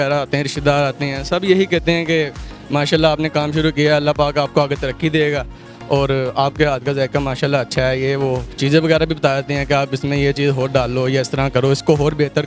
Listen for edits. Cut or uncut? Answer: uncut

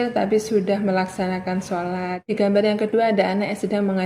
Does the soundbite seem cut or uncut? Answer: cut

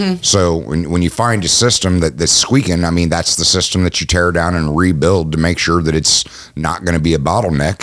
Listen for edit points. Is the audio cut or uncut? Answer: uncut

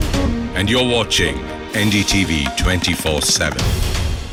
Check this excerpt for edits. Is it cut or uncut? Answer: uncut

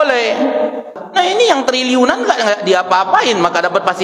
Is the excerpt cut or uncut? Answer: cut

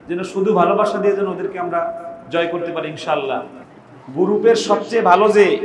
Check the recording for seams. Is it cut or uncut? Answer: uncut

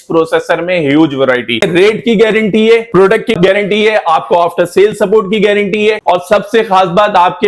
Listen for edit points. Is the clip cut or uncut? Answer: cut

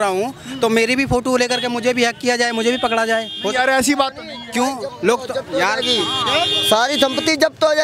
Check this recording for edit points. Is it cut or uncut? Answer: uncut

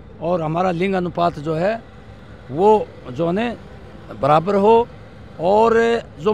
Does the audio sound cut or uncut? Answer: uncut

